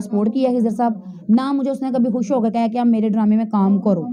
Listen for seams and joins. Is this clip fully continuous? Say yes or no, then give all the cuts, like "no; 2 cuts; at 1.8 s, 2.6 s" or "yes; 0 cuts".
yes; 0 cuts